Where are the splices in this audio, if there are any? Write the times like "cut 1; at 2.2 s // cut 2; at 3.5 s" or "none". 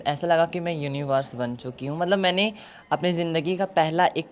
none